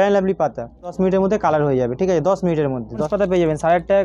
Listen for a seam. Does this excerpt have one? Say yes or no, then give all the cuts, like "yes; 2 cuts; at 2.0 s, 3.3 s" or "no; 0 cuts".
yes; 2 cuts; at 0.9 s, 3.1 s